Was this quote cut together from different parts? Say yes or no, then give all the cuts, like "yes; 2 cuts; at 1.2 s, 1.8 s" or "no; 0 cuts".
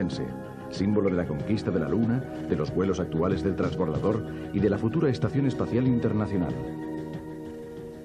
yes; 1 cut; at 6.6 s